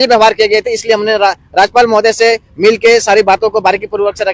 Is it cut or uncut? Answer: uncut